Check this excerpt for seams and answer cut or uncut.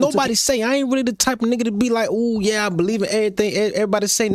uncut